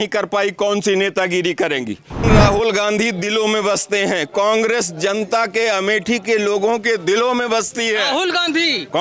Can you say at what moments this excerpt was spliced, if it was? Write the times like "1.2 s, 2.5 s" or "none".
2.2 s